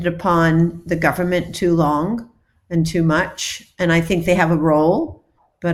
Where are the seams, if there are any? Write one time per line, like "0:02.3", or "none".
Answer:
none